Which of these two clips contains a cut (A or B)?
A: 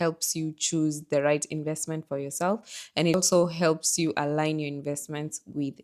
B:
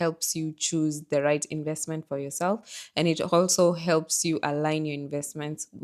A